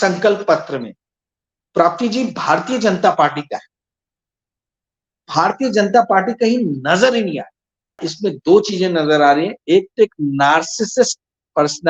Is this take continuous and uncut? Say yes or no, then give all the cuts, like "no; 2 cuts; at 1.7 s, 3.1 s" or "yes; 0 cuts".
no; 1 cut; at 8.1 s